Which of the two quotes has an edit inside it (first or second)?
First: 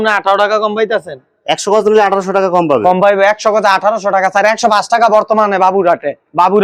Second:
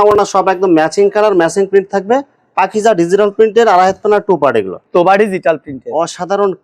second